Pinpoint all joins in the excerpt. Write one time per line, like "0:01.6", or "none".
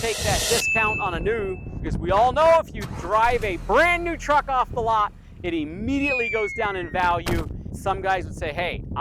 0:01.7
0:07.7